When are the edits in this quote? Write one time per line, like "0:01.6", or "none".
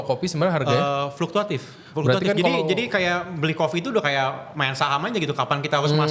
none